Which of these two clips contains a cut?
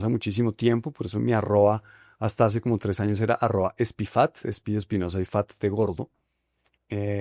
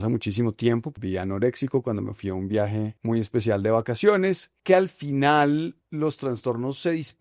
second; 4 cuts; at 1.0 s, 3.0 s, 4.5 s, 5.8 s

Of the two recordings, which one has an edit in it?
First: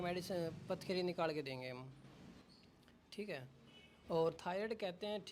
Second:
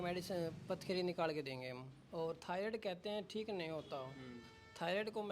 second; 1 cut; at 1.9 s

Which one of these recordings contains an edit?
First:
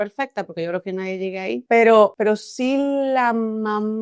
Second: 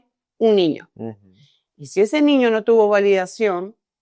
first; 2 cuts; at 1.6 s, 2.1 s

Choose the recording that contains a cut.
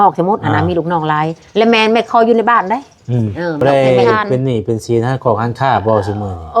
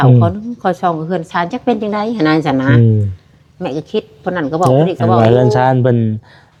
first; 1 cut; at 3.6 s

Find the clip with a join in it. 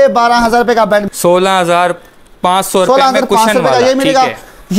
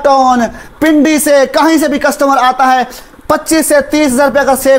first; 1 cut; at 1.1 s

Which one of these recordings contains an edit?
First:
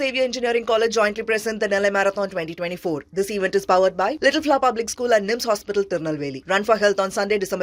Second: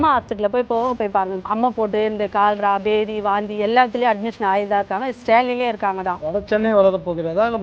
second; 2 cuts; at 1.4 s, 6.2 s

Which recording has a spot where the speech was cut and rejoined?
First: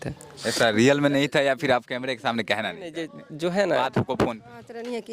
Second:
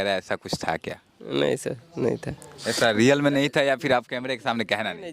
first; 1 cut; at 3.8 s

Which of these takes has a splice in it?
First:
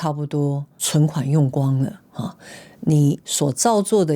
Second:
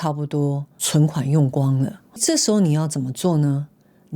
second; 1 cut; at 2.2 s

